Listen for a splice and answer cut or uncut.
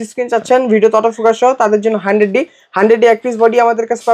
uncut